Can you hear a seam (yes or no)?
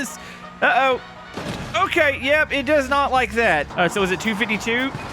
yes